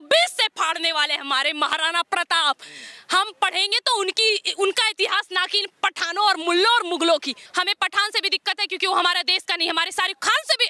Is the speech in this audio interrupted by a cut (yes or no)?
yes